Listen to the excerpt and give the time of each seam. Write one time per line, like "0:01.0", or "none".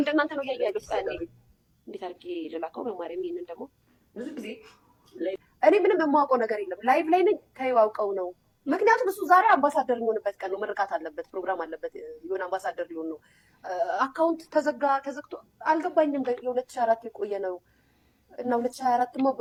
none